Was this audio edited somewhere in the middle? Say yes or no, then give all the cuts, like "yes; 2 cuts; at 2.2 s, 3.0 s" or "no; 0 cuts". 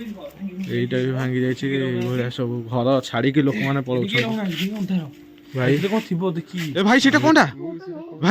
yes; 1 cut; at 6.7 s